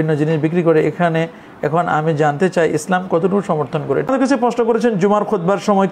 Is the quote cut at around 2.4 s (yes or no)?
no